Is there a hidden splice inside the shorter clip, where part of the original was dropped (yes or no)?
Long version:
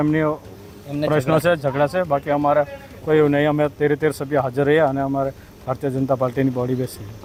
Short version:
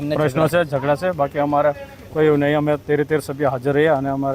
no